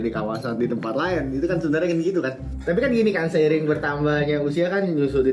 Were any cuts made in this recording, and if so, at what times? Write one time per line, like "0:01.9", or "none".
0:02.5